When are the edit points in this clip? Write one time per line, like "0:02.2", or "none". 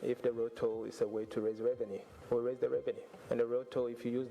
0:02.1
0:03.1

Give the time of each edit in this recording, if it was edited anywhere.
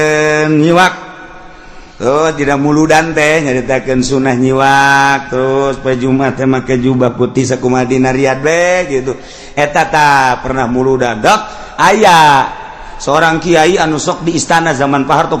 none

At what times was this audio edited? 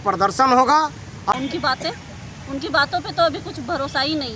0:01.3

